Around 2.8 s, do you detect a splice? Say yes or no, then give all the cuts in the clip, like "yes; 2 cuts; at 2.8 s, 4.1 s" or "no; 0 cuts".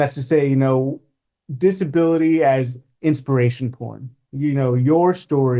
yes; 1 cut; at 2.8 s